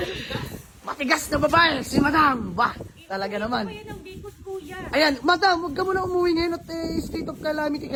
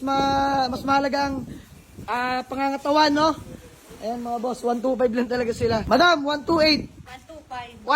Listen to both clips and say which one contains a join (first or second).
second